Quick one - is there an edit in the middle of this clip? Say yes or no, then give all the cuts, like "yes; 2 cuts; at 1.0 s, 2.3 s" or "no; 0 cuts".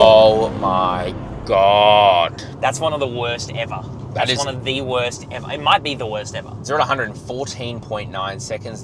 no; 0 cuts